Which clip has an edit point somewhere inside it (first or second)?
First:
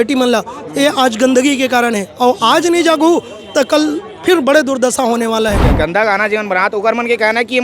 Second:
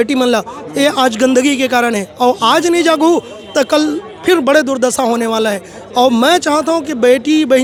first